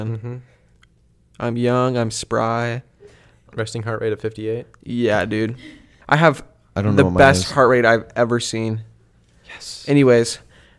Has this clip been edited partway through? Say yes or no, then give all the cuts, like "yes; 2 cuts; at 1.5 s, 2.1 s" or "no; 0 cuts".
yes; 2 cuts; at 3.5 s, 5.9 s